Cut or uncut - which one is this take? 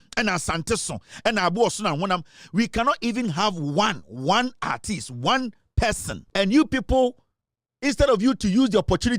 cut